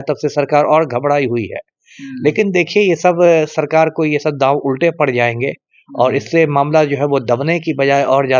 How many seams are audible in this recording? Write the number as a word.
zero